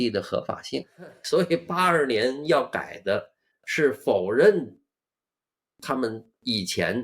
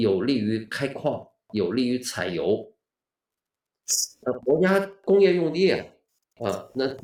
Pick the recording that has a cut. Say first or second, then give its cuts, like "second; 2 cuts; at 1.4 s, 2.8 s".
first; 1 cut; at 1.2 s